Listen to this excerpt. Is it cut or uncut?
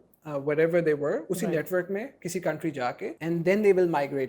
cut